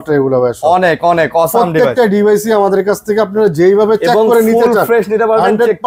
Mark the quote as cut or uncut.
uncut